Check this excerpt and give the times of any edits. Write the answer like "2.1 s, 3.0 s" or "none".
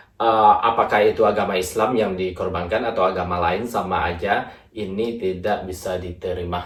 none